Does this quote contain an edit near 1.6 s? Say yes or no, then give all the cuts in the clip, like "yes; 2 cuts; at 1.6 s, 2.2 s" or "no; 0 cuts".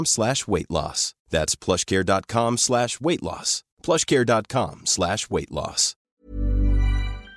no; 1 cut; at 6.1 s